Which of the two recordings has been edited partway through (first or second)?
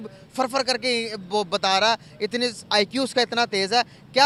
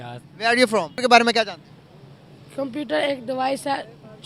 second